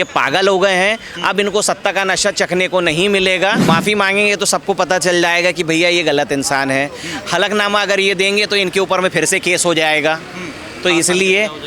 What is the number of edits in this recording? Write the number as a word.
one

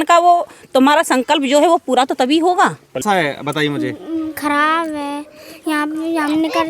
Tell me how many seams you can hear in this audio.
one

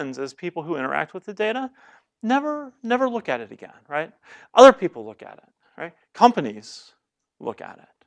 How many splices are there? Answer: one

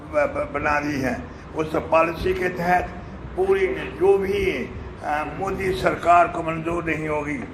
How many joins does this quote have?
zero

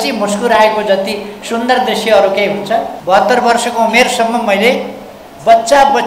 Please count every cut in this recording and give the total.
one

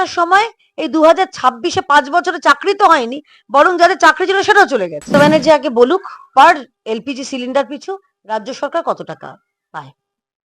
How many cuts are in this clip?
one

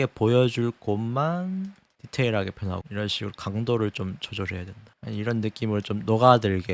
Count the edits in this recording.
zero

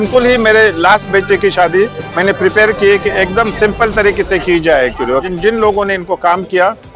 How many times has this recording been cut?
one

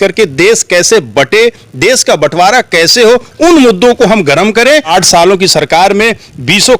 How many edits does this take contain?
one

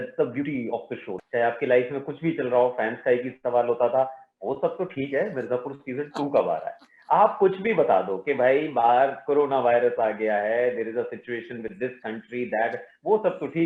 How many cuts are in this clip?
one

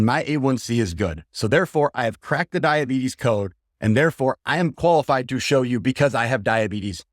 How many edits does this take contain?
one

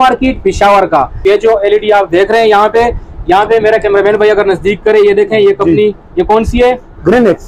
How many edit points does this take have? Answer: one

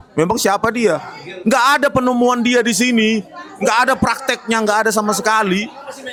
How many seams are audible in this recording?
zero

